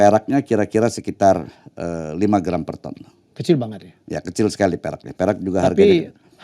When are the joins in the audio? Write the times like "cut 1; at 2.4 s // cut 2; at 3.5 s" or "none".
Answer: none